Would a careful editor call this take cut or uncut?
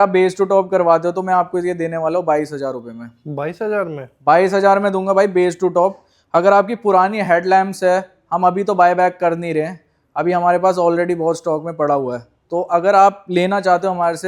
uncut